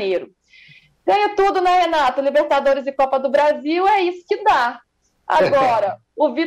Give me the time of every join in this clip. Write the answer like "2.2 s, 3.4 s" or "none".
none